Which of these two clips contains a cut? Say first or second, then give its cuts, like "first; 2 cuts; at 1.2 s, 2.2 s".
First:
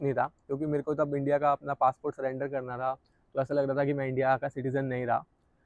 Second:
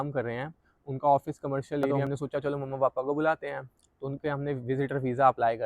second; 1 cut; at 2.0 s